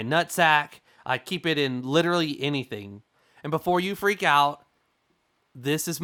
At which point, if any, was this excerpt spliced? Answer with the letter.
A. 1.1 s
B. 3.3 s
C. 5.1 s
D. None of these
D